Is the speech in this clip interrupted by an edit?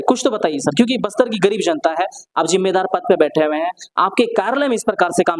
no; 0 cuts

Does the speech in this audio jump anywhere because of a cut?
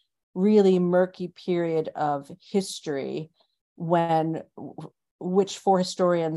no; 0 cuts

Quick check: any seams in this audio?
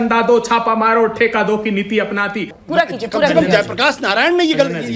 yes; 1 cut; at 2.5 s

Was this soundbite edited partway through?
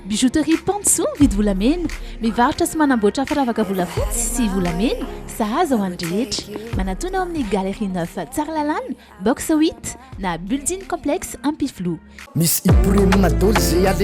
yes; 1 cut; at 12.2 s

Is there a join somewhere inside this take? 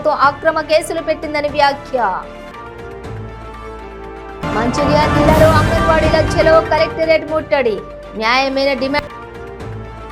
yes; 1 cut; at 9.1 s

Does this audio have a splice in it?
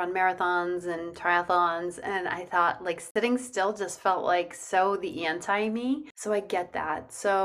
yes; 2 cuts; at 3.1 s, 6.1 s

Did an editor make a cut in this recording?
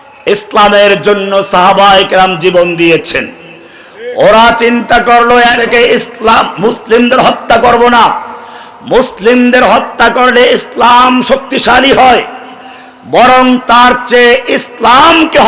yes; 1 cut; at 5.6 s

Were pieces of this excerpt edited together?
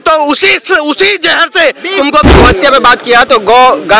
yes; 1 cut; at 2.4 s

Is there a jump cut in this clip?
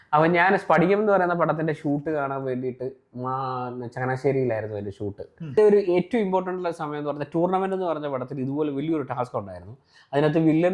yes; 1 cut; at 5.5 s

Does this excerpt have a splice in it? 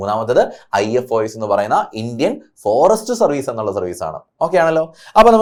no; 0 cuts

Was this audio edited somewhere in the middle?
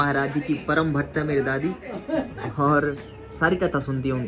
no; 0 cuts

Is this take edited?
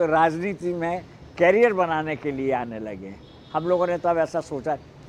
no; 0 cuts

